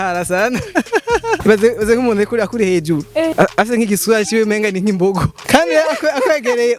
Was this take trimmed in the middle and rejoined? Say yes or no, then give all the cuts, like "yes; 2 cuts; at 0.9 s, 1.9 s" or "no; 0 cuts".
yes; 3 cuts; at 1.4 s, 3.3 s, 5.4 s